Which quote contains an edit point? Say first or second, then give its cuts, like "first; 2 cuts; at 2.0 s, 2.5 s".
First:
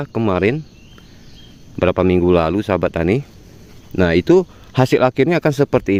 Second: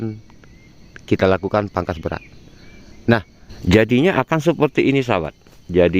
second; 1 cut; at 3.4 s